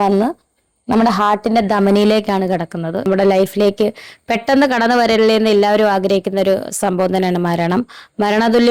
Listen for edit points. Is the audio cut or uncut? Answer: cut